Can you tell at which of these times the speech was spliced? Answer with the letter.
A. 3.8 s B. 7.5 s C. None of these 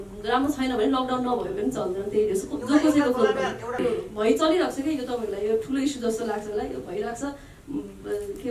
A